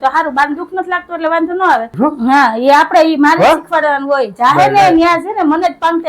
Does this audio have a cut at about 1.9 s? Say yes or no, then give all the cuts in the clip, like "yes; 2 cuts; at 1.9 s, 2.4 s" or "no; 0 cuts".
yes; 1 cut; at 1.9 s